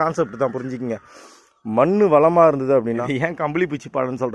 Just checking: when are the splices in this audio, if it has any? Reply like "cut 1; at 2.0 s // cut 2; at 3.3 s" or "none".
cut 1; at 3.0 s